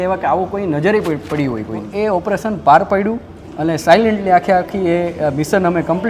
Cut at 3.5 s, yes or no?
no